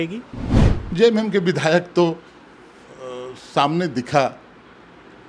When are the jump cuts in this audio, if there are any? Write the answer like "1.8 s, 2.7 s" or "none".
none

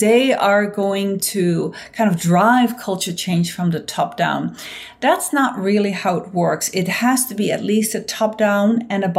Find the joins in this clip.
none

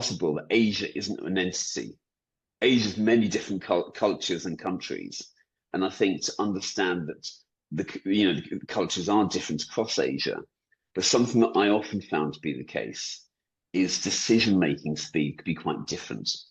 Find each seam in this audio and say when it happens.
none

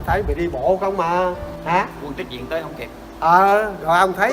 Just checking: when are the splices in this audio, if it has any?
1.5 s

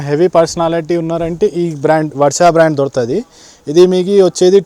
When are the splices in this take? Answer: none

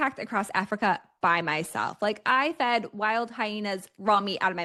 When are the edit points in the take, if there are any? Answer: none

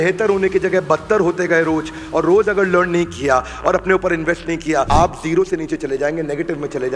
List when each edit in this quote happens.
4.9 s

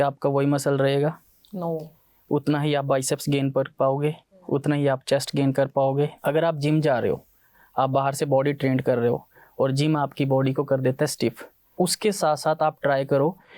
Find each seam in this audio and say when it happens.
6.1 s, 11.7 s

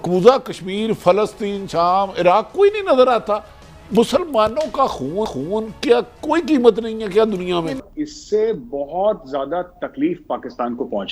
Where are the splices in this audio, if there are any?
7.8 s

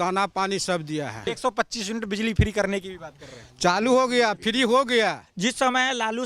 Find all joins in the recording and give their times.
1.3 s, 5.3 s

